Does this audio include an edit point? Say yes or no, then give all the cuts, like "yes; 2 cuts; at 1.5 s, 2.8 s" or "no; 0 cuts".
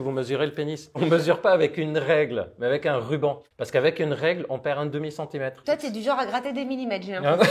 yes; 2 cuts; at 1.0 s, 5.6 s